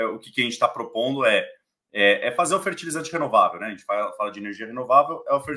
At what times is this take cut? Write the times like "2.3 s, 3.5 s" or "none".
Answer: none